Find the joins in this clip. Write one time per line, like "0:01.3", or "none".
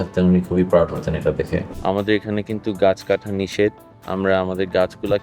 0:01.7